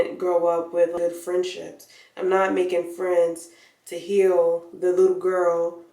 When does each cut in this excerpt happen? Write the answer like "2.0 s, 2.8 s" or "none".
0.9 s

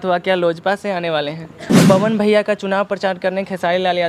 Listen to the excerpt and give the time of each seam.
1.6 s

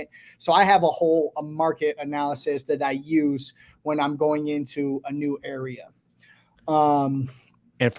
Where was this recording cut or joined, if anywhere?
none

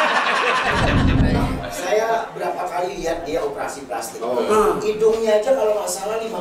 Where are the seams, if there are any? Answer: 1.2 s

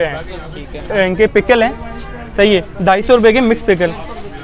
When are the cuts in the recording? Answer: 0.9 s

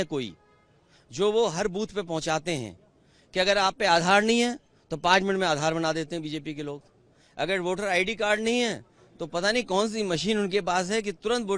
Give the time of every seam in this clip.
none

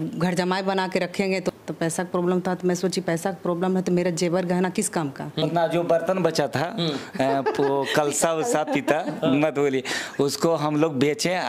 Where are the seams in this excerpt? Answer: 1.5 s, 5.4 s

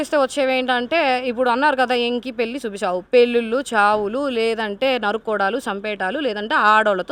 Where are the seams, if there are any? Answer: none

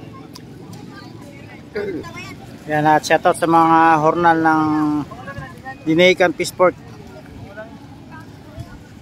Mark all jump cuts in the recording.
2.1 s

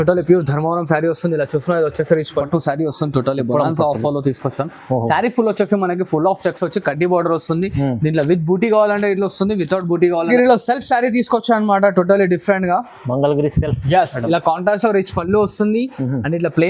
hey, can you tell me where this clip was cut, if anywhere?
2.5 s, 10.3 s

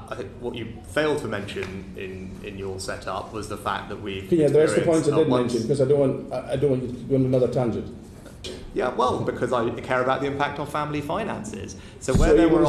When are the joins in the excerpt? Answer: 8.6 s

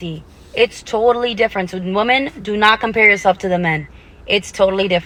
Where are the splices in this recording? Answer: none

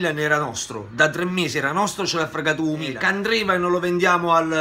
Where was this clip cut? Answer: 3.0 s

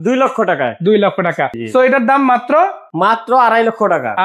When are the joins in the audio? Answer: 1.6 s, 2.8 s

